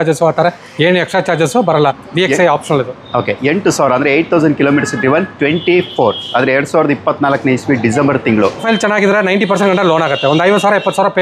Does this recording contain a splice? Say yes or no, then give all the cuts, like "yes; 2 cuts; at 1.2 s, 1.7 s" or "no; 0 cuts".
yes; 2 cuts; at 2.0 s, 8.6 s